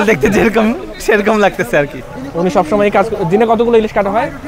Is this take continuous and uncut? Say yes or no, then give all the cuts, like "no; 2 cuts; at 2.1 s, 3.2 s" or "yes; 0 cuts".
no; 1 cut; at 2.0 s